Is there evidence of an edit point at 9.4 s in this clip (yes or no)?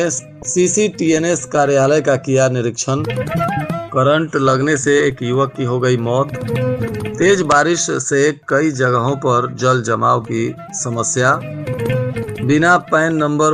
no